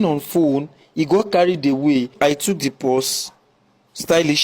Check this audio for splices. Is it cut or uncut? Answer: cut